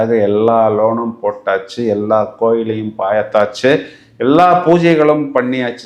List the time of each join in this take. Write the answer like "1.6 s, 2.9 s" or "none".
none